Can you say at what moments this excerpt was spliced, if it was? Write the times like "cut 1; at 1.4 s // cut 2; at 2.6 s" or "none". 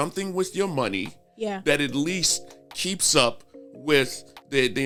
none

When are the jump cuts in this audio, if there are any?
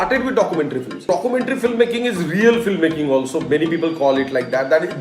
cut 1; at 1.1 s

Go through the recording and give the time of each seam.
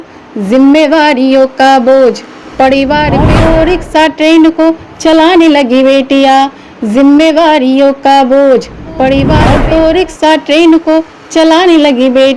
cut 1; at 3.3 s // cut 2; at 9.4 s

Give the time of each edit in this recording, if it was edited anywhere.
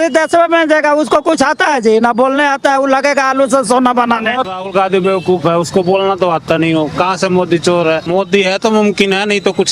cut 1; at 4.5 s // cut 2; at 8.1 s

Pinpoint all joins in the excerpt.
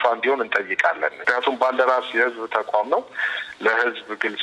cut 1; at 1.2 s

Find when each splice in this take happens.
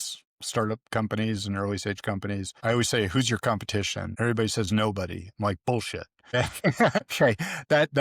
cut 1; at 2.5 s // cut 2; at 4.0 s // cut 3; at 6.3 s // cut 4; at 7.0 s

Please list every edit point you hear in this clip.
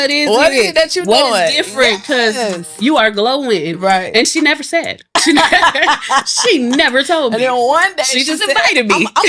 cut 1; at 5.0 s

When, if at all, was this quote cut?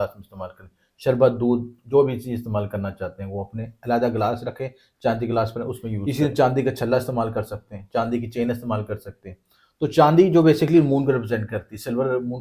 cut 1; at 6.0 s

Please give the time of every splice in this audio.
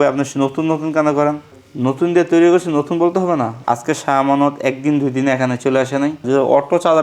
cut 1; at 3.6 s // cut 2; at 6.2 s

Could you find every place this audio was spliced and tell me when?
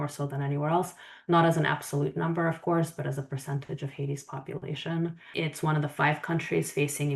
cut 1; at 5.2 s

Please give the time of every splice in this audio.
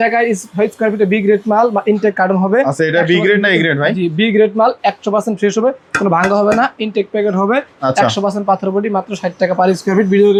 none

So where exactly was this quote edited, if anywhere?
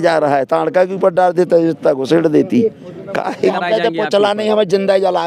cut 1; at 3.5 s

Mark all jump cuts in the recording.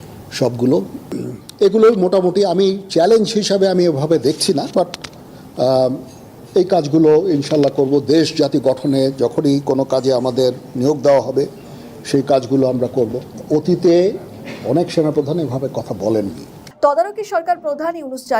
cut 1; at 1.0 s // cut 2; at 16.6 s

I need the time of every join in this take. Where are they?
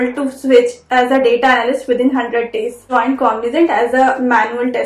cut 1; at 2.8 s

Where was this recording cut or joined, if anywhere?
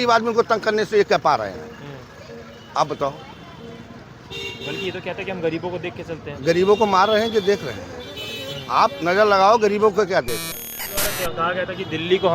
cut 1; at 10.9 s

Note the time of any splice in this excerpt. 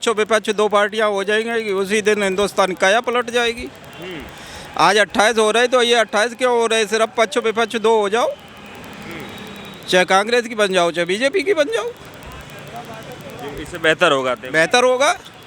none

